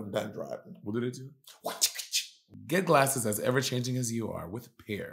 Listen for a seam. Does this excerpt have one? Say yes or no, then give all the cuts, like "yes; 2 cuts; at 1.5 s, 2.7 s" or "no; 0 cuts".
yes; 1 cut; at 2.4 s